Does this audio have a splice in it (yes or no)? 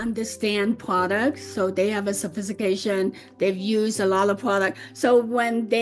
no